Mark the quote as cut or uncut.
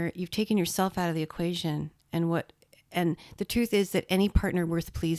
uncut